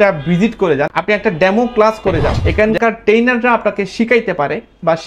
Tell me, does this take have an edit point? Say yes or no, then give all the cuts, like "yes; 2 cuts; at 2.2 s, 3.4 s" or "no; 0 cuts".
yes; 2 cuts; at 0.9 s, 2.4 s